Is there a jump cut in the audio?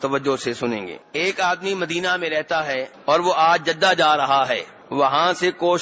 yes; 3 cuts; at 1.0 s, 2.9 s, 4.8 s

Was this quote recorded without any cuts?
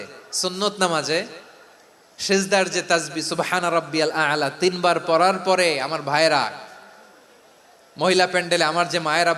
yes; 0 cuts

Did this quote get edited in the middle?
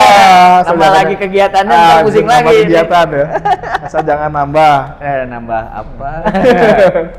no; 0 cuts

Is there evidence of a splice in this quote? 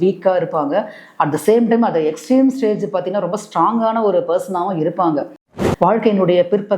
yes; 1 cut; at 5.5 s

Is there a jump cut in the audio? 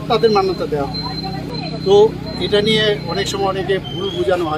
yes; 1 cut; at 1.5 s

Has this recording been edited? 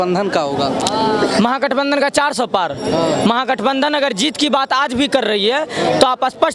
no; 0 cuts

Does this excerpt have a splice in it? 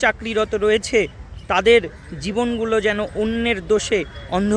no; 0 cuts

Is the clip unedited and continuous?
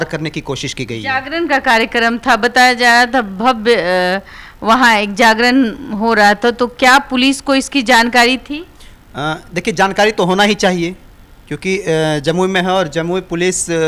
yes; 0 cuts

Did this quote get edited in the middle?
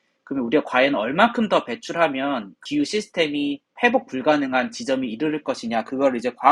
yes; 2 cuts; at 2.6 s, 3.7 s

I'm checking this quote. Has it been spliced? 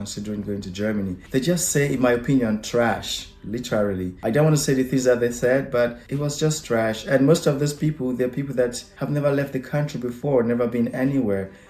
no; 0 cuts

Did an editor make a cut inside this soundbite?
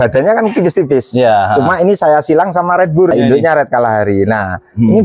yes; 1 cut; at 3.1 s

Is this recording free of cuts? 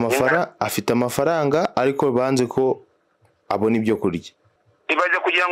yes; 0 cuts

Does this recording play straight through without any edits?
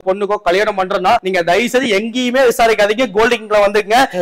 no; 1 cut; at 1.2 s

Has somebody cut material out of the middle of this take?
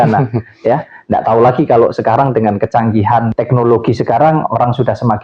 yes; 1 cut; at 3.3 s

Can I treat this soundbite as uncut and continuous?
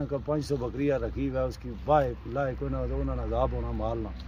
yes; 0 cuts

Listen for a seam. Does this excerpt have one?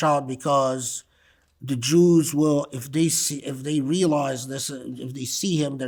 no; 0 cuts

